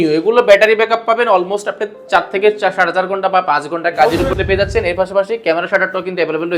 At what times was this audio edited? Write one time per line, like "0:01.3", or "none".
0:04.3

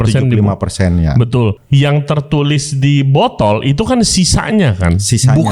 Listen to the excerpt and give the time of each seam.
0:01.6

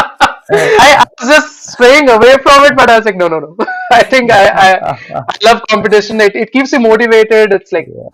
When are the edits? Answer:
none

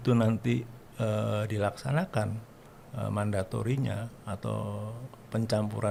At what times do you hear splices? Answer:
none

